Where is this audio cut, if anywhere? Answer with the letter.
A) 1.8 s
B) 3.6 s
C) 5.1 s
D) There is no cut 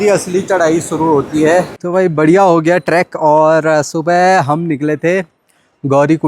A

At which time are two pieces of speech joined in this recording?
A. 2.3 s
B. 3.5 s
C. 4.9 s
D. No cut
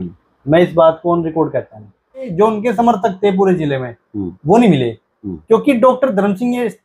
A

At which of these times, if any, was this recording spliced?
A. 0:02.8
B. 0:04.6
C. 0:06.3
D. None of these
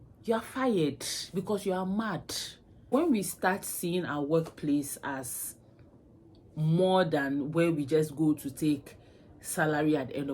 A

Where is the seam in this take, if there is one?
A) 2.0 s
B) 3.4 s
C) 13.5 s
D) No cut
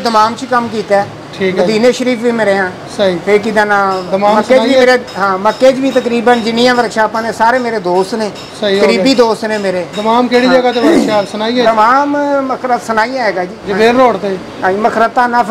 C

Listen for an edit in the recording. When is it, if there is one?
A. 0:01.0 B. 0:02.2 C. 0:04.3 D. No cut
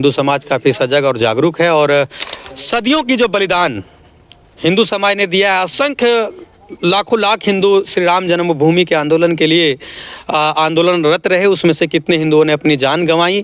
B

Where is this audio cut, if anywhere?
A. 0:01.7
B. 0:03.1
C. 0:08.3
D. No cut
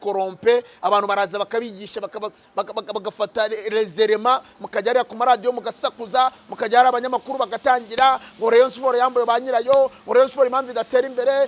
D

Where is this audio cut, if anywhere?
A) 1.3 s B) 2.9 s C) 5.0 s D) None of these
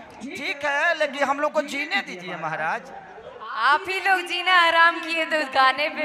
D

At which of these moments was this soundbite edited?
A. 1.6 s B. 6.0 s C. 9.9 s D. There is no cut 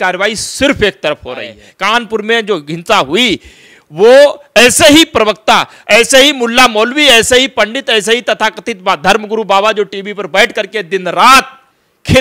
A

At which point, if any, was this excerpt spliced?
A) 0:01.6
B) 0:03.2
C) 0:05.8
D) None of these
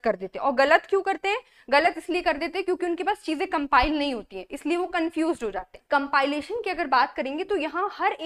C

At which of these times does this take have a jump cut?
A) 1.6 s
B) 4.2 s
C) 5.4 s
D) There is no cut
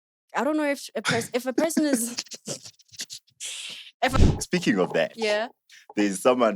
B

